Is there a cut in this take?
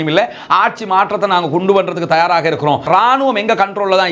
yes; 1 cut; at 2.9 s

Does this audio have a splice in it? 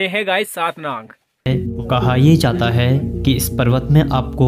yes; 1 cut; at 1.5 s

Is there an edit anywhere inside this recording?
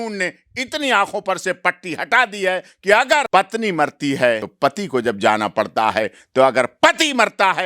yes; 2 cuts; at 3.3 s, 4.5 s

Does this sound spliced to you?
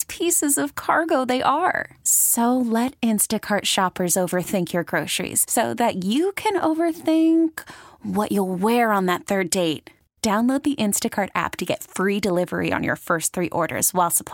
no; 0 cuts

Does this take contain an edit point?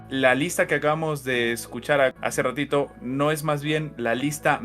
yes; 1 cut; at 2.2 s

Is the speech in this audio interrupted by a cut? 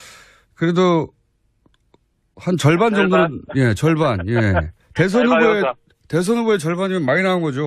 yes; 1 cut; at 4.2 s

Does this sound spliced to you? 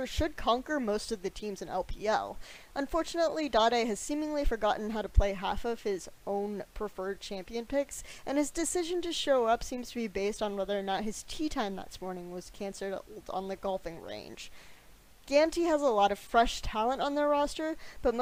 no; 0 cuts

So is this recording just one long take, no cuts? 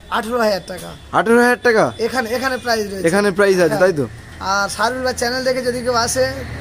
yes; 0 cuts

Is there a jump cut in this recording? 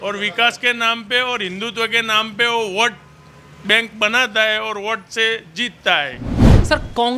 no; 0 cuts

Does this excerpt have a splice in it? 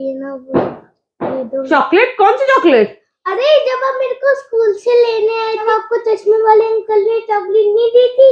yes; 2 cuts; at 1.6 s, 5.7 s

